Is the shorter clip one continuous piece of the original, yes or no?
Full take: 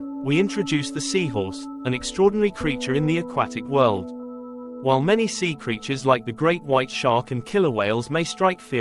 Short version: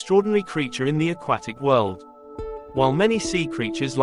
yes